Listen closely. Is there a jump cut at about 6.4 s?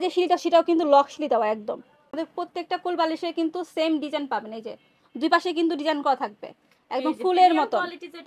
no; 1 cut; at 2.1 s

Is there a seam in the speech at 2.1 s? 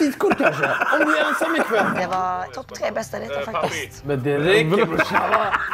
yes; 2 cuts; at 2.1 s, 4.0 s

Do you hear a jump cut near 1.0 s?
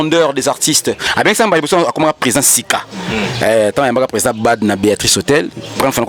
yes; 1 cut; at 1.0 s

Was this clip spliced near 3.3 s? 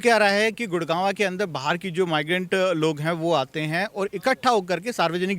no; 0 cuts

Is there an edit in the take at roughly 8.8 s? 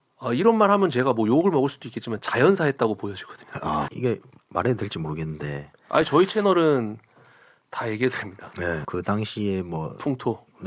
yes; 2 cuts; at 3.9 s, 8.8 s

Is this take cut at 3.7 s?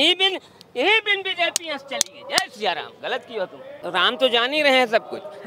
yes; 1 cut; at 3.7 s

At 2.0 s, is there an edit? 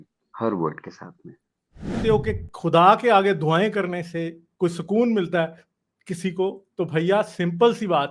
yes; 1 cut; at 2.0 s

